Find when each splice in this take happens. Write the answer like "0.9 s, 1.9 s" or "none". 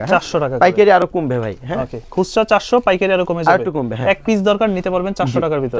none